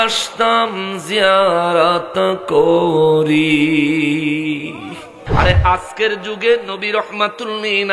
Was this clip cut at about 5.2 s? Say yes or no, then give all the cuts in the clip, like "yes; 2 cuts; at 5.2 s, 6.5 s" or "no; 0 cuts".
yes; 1 cut; at 5.2 s